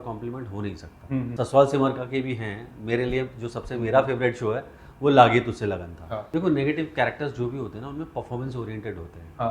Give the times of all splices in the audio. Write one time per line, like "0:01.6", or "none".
0:01.3
0:06.2